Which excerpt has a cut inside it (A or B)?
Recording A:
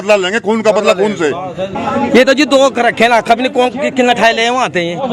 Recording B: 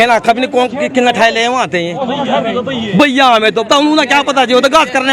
A